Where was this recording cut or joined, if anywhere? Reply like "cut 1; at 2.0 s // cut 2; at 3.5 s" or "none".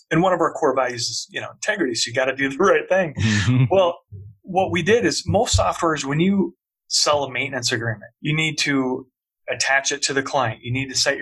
cut 1; at 4.1 s // cut 2; at 8.1 s